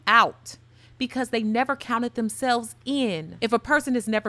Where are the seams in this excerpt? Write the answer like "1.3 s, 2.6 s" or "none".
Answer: 3.3 s